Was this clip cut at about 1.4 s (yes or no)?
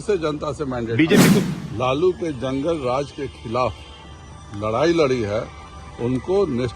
yes